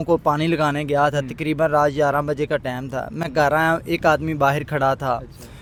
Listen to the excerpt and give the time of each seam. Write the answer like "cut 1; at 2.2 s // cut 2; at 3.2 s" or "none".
none